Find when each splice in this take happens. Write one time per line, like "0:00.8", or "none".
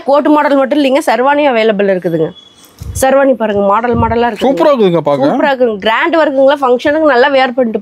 none